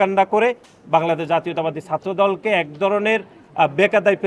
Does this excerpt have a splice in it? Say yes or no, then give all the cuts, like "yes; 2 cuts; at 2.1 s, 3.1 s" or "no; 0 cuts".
no; 0 cuts